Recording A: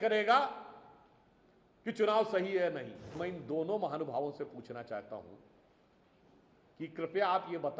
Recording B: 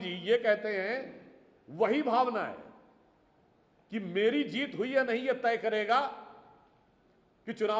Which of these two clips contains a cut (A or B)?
A